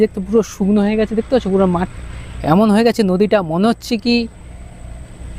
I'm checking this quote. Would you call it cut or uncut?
uncut